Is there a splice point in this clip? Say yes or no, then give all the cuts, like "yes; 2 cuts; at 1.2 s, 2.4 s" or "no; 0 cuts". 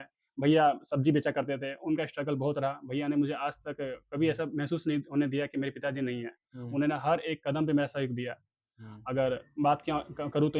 no; 0 cuts